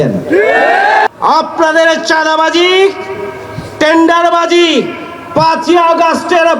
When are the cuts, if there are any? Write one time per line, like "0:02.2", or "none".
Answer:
0:01.1